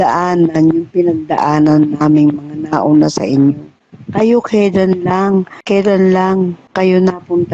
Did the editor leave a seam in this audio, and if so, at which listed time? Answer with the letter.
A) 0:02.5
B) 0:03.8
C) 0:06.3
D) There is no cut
D